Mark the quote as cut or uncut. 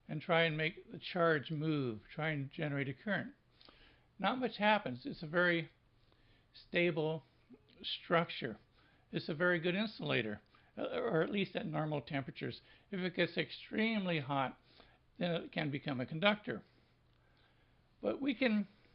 cut